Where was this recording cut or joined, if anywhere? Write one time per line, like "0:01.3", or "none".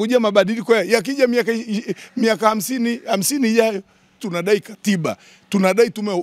0:04.3